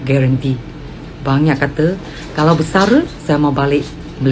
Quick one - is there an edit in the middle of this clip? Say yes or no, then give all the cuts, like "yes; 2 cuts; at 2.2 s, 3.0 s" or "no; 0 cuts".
no; 0 cuts